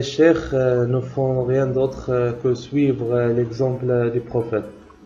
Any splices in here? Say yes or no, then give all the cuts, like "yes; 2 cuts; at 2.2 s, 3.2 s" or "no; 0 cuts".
no; 0 cuts